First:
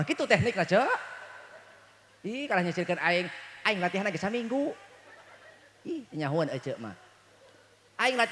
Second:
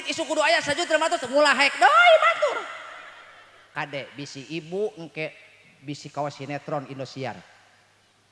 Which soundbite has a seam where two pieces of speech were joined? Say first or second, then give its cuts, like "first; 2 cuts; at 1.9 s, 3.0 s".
second; 1 cut; at 3.6 s